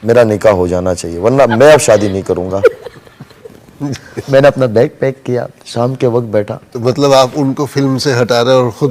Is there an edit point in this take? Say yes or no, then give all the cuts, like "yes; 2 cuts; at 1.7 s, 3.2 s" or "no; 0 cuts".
yes; 1 cut; at 3.5 s